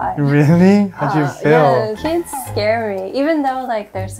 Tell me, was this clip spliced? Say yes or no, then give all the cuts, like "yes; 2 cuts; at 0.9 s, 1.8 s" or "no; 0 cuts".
no; 0 cuts